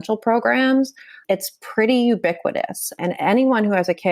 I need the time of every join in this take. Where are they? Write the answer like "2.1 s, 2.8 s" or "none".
1.2 s, 2.9 s